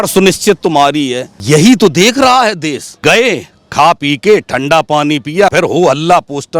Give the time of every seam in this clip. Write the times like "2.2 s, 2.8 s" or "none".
1.3 s, 2.9 s, 5.5 s